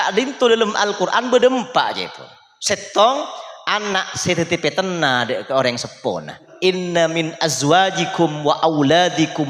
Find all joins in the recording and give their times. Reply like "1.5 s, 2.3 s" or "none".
6.5 s

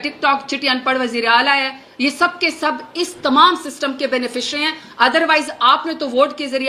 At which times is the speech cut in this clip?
none

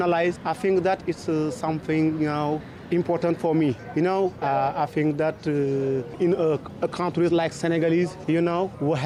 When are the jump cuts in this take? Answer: none

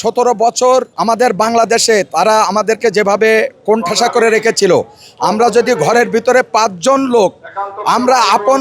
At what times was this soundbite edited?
0.9 s

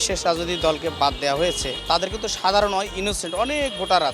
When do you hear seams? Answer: 1.7 s

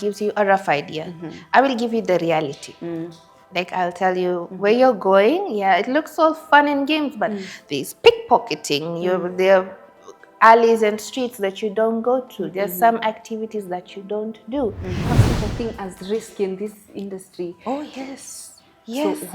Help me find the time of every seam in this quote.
15.0 s

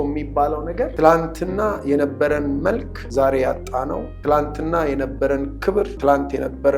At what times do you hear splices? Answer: 0.9 s, 3.0 s, 4.1 s, 5.9 s

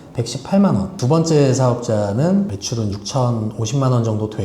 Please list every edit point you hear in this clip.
1.0 s, 2.5 s

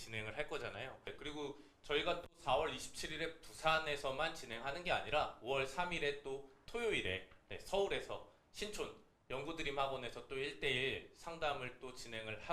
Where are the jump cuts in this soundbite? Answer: 1.1 s

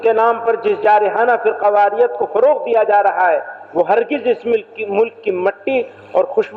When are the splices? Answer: none

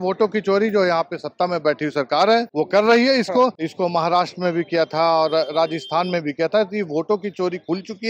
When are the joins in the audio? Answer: 2.5 s, 3.6 s

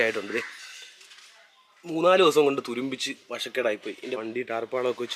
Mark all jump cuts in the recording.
4.2 s

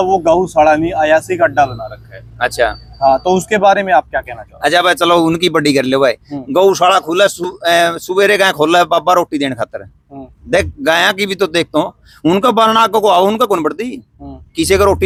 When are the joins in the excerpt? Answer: none

